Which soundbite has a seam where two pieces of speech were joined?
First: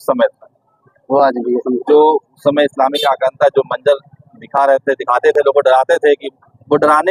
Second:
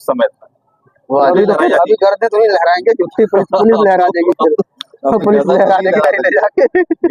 second; 1 cut; at 1.3 s

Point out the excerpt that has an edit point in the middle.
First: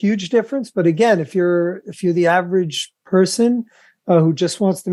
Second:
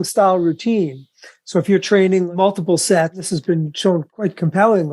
second; 3 cuts; at 2.3 s, 3.2 s, 4.1 s

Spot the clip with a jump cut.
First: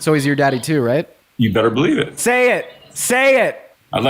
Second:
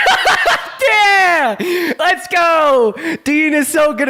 first; 1 cut; at 2.2 s

